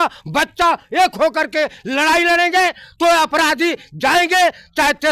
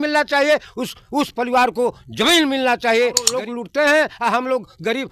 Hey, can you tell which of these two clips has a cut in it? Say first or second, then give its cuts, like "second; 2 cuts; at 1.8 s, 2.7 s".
second; 1 cut; at 3.4 s